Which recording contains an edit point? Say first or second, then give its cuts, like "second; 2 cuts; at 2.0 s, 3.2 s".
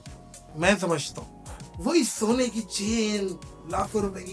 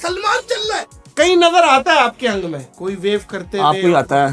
second; 2 cuts; at 1.0 s, 2.7 s